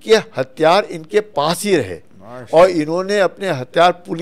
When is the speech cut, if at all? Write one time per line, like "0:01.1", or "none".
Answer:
none